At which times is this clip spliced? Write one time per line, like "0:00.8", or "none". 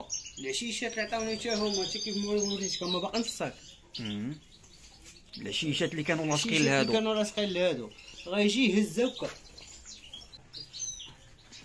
0:10.5